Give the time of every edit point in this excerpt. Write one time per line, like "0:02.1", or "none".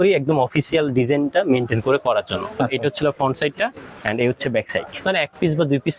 0:02.6
0:05.0